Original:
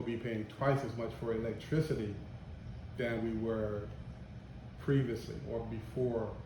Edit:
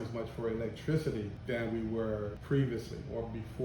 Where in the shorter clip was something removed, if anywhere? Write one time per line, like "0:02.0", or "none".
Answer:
0:01.4
0:02.4